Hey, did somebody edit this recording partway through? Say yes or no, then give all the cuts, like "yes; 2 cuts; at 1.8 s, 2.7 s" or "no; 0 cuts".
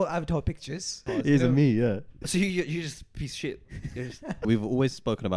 yes; 3 cuts; at 1.0 s, 2.1 s, 4.4 s